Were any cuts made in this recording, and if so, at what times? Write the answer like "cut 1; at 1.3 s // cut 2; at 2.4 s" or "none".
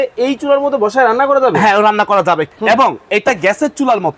cut 1; at 2.5 s